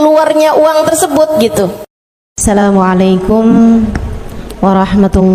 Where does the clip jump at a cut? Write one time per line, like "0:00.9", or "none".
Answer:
0:02.4